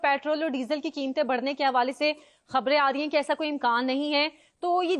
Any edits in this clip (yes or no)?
no